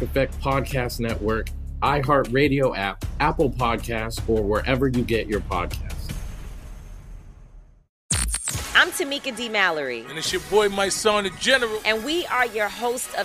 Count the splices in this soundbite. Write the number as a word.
one